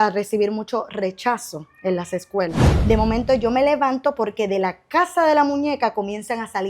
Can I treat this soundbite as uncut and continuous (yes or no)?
no